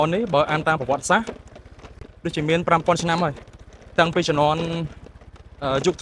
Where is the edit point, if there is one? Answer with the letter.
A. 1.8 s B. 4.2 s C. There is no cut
A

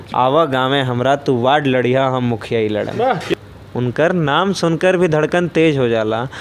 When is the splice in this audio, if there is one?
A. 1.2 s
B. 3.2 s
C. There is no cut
B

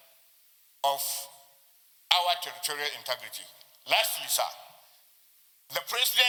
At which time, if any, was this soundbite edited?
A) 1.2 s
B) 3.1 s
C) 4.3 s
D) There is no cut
D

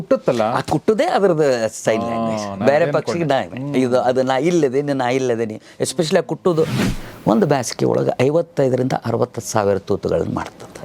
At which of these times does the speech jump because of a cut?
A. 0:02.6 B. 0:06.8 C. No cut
B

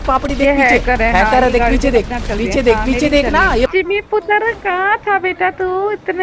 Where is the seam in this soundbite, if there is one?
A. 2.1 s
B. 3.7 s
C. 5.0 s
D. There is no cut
B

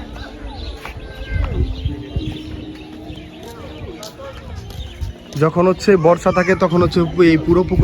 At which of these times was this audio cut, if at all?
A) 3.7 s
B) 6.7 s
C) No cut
C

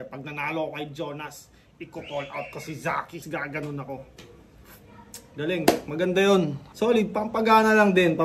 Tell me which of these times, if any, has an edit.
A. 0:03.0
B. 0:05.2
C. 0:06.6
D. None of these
C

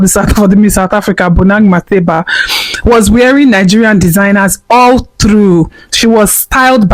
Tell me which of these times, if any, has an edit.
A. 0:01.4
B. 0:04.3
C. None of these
C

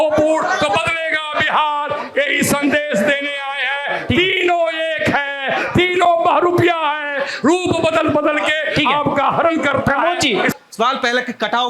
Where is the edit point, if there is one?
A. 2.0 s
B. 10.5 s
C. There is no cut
B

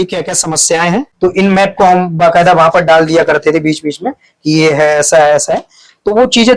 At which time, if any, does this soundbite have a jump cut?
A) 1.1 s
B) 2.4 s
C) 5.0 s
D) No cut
A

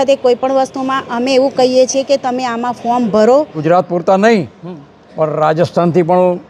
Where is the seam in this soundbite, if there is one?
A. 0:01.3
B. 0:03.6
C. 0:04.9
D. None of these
B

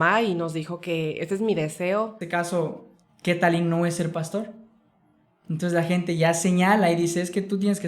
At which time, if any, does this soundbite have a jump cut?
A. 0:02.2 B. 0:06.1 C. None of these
A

